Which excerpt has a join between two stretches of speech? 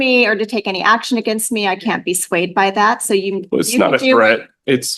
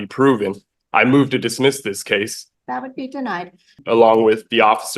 second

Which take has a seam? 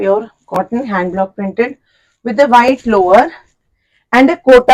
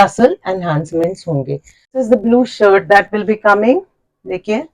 second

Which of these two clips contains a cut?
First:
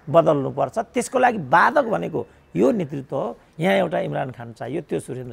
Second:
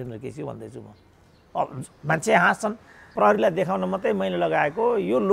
second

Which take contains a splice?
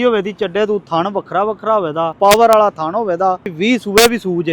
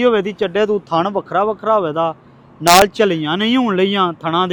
first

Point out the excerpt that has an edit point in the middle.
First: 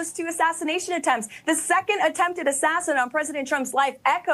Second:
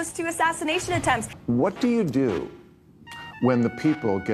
second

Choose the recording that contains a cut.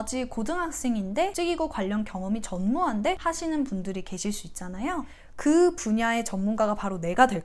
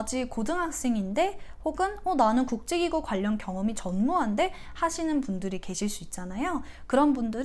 first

